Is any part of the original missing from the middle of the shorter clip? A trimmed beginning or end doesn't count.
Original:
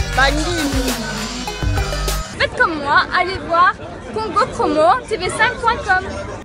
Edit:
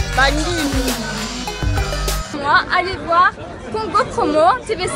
yes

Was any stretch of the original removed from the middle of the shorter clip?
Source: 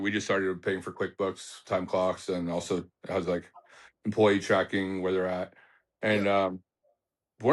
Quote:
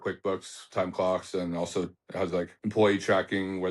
yes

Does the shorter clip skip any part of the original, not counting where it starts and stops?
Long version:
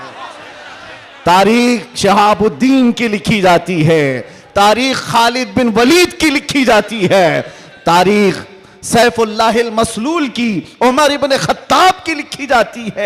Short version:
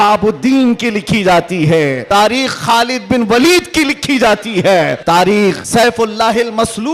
yes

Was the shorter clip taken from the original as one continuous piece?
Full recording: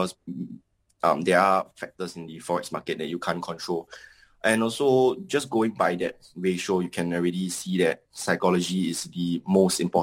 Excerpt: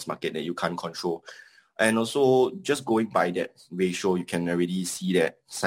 yes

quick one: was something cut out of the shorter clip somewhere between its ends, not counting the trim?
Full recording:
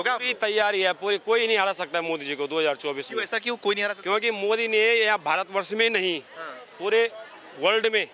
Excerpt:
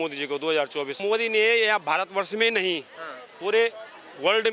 yes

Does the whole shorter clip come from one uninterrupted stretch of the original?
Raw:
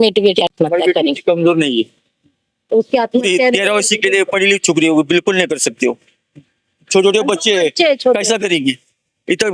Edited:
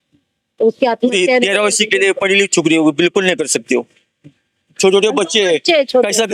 yes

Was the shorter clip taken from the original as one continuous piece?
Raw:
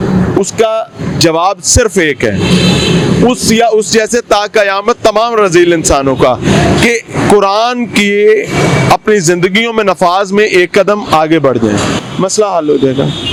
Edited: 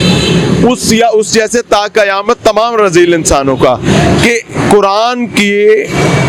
yes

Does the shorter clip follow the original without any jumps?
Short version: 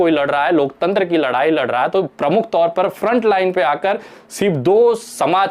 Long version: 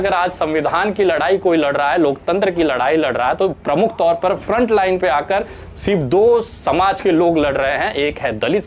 yes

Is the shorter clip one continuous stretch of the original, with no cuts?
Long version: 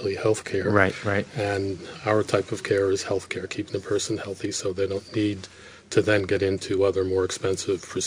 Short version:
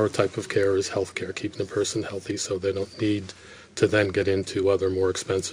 yes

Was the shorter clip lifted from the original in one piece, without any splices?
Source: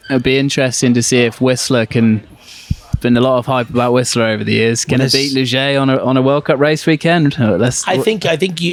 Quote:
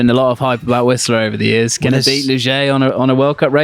yes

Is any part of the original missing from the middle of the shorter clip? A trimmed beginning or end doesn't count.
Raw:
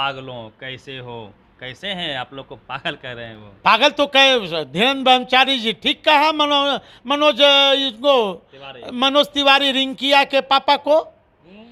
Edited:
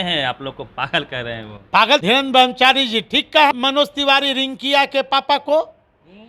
yes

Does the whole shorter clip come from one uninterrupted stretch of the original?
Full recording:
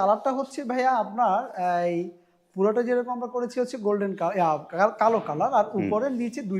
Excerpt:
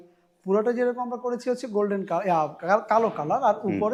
yes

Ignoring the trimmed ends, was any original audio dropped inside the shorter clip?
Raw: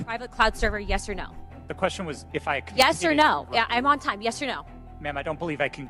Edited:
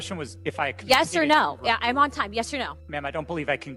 yes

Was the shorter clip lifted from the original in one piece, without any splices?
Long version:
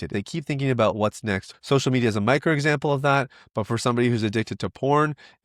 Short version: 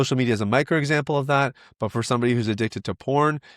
yes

